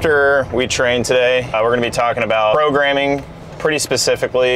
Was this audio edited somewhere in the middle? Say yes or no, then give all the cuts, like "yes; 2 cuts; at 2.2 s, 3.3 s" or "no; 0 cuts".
yes; 2 cuts; at 1.5 s, 2.5 s